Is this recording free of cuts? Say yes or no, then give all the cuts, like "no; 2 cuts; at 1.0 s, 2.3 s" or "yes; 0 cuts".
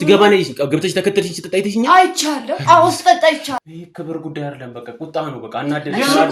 no; 1 cut; at 3.5 s